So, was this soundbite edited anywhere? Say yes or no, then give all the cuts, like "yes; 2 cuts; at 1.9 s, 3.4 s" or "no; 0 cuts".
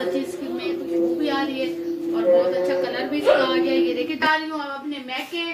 yes; 1 cut; at 4.2 s